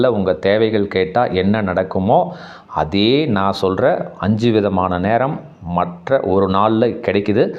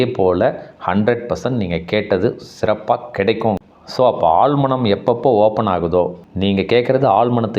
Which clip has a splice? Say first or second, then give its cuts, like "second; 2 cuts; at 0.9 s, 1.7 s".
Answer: second; 1 cut; at 3.6 s